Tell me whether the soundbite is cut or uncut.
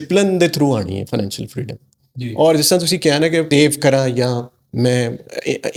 uncut